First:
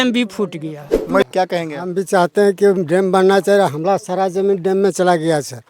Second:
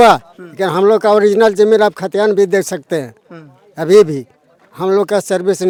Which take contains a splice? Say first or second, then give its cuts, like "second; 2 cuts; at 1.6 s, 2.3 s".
first; 1 cut; at 1.2 s